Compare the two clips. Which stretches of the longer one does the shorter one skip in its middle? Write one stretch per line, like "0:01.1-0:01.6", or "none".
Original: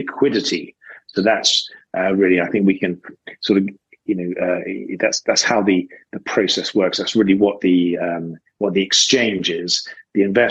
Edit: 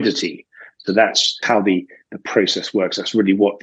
0:01.7-0:05.4